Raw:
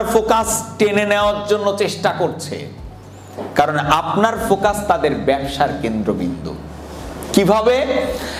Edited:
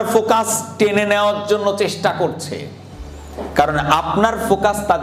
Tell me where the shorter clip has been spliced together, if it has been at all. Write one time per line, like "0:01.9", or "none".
none